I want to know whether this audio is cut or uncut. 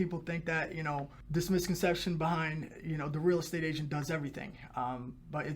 cut